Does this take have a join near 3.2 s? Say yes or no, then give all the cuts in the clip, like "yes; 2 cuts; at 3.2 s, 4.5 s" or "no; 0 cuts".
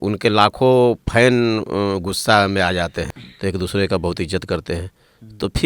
yes; 1 cut; at 3.2 s